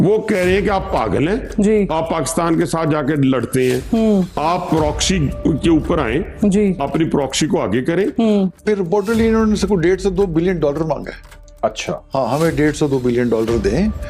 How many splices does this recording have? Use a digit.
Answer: 1